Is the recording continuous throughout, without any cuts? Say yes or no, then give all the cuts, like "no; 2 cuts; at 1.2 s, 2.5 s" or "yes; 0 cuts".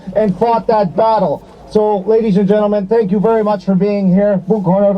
yes; 0 cuts